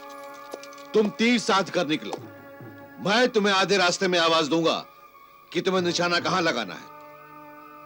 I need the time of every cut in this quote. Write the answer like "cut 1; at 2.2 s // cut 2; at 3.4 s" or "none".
none